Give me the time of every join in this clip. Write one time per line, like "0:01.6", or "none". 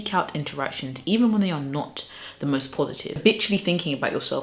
0:03.2